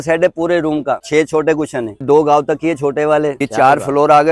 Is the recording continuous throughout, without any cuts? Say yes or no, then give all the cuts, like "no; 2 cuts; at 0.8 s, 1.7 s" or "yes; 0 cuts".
no; 3 cuts; at 1.0 s, 2.0 s, 3.4 s